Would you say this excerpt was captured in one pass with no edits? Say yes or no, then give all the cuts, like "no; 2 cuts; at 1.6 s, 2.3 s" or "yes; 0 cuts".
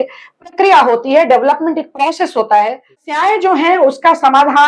no; 1 cut; at 3.2 s